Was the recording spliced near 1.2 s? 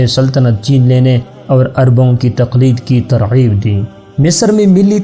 no; 0 cuts

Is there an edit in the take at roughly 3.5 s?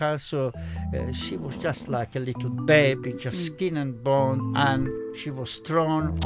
no; 1 cut; at 4.8 s

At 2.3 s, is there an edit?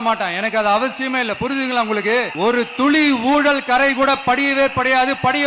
yes; 1 cut; at 2.3 s

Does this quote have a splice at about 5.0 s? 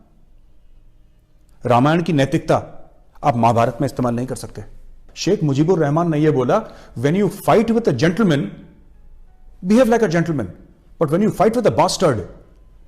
yes; 1 cut; at 5.0 s

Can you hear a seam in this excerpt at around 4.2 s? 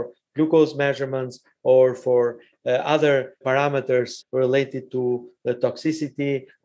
yes; 1 cut; at 4.2 s

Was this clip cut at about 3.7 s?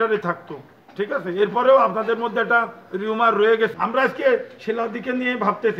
yes; 1 cut; at 3.7 s

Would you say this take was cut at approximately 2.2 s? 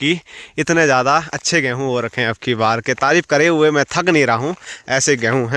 no; 0 cuts

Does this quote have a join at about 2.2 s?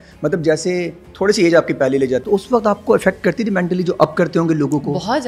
yes; 1 cut; at 2.2 s

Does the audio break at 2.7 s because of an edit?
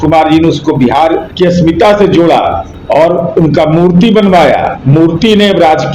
yes; 3 cuts; at 1.3 s, 2.7 s, 4.8 s

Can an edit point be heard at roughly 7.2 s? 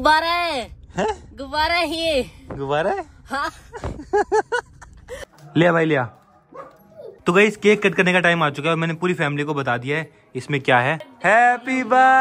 yes; 3 cuts; at 5.1 s, 7.2 s, 11.1 s

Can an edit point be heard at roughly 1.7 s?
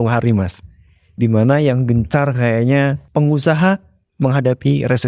no; 1 cut; at 3.0 s

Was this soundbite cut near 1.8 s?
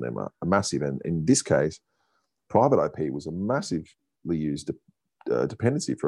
no; 0 cuts

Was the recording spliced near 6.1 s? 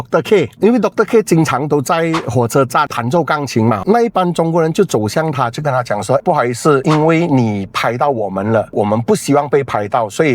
no; 1 cut; at 3.8 s

